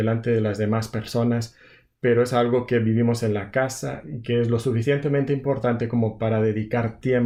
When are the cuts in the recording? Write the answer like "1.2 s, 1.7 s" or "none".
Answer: none